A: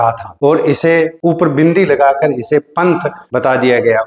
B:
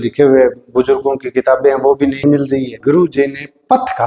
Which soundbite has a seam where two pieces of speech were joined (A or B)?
B